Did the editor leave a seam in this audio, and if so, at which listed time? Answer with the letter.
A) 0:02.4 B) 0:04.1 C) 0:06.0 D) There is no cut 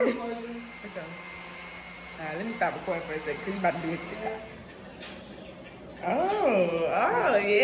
B